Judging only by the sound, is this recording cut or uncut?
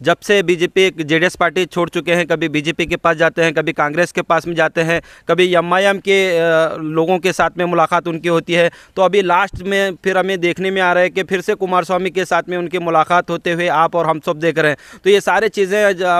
uncut